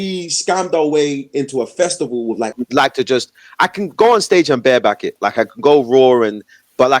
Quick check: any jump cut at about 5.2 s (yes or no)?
no